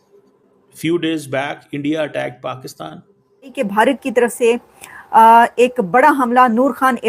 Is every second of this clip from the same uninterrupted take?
no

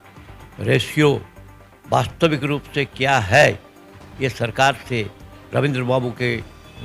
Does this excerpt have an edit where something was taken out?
no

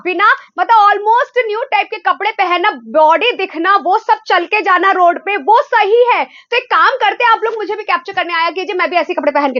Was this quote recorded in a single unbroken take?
yes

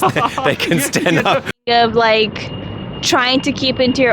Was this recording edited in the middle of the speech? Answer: yes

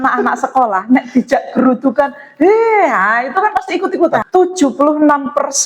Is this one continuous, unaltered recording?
no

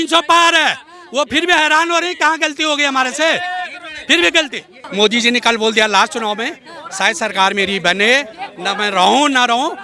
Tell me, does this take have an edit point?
yes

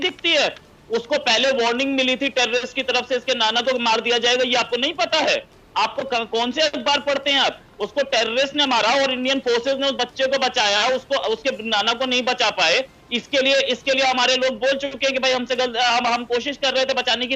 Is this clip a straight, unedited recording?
yes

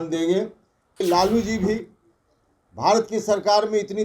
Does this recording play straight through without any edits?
no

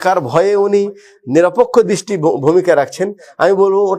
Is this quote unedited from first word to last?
yes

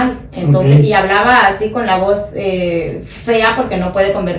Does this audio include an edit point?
no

